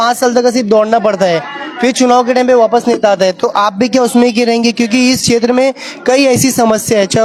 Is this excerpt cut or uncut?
uncut